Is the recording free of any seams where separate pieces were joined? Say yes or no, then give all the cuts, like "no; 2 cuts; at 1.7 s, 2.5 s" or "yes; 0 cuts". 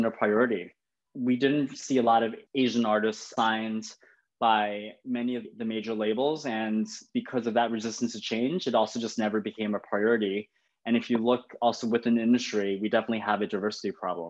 yes; 0 cuts